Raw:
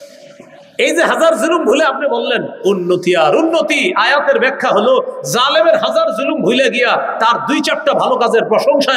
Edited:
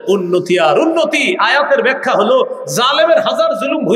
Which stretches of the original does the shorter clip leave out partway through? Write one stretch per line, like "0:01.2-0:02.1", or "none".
none